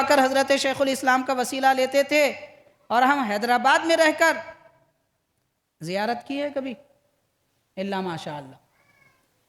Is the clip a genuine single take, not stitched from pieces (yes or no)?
yes